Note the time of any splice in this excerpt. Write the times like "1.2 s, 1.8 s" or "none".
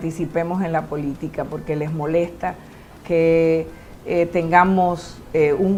none